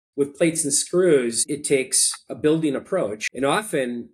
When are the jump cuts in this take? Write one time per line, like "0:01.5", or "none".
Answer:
0:03.2

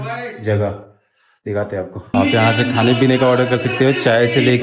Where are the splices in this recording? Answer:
0:02.1

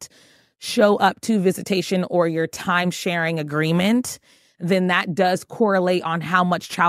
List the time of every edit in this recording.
none

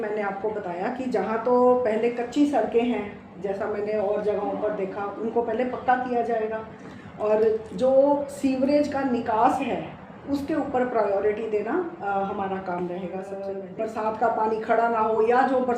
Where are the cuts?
0:13.5

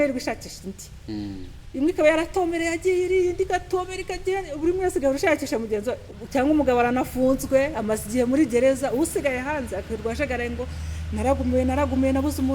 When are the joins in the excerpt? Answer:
0:06.1

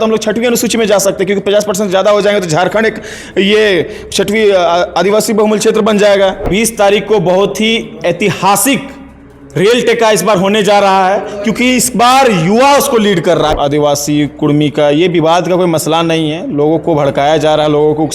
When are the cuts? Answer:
0:06.5
0:13.5

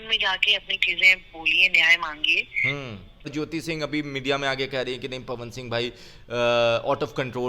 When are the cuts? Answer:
0:03.3

